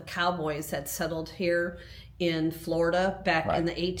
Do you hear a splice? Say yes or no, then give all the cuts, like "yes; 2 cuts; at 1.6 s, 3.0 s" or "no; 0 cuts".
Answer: no; 0 cuts